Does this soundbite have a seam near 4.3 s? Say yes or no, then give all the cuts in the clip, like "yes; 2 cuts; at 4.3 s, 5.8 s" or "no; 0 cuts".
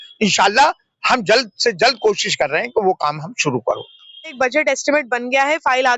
yes; 1 cut; at 4.3 s